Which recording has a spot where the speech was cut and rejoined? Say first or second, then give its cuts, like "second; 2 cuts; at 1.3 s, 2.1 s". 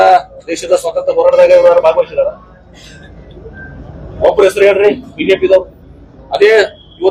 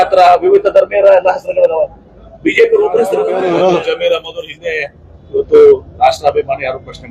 second; 1 cut; at 3.3 s